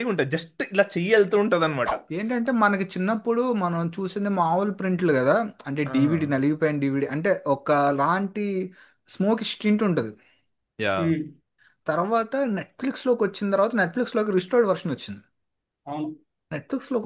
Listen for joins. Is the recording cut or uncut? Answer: cut